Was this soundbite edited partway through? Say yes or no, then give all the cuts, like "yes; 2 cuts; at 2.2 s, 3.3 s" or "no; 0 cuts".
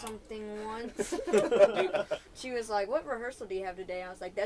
yes; 1 cut; at 2.3 s